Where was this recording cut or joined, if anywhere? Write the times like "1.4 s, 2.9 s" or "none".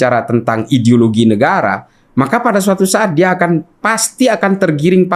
none